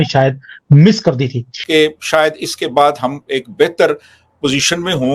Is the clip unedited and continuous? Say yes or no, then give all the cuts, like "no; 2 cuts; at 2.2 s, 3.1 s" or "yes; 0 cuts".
no; 1 cut; at 1.6 s